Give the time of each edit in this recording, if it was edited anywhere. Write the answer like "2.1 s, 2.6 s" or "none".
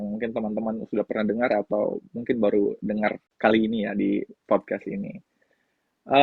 3.3 s, 4.3 s

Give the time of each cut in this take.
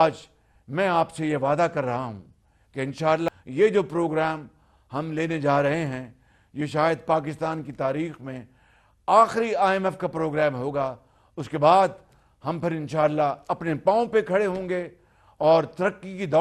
3.3 s

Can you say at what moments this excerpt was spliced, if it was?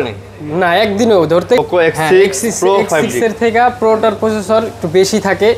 1.6 s

